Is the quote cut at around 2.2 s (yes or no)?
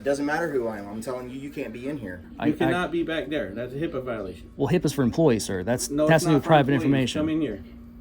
yes